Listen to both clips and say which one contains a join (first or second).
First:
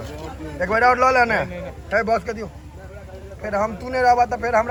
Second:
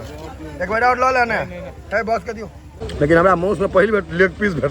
second